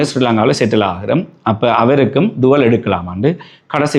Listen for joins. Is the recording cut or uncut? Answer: uncut